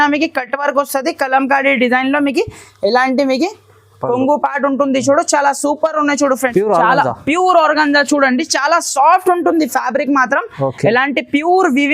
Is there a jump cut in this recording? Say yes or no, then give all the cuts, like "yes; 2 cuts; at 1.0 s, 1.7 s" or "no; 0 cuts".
yes; 1 cut; at 6.4 s